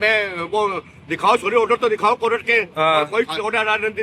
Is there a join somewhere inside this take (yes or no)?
no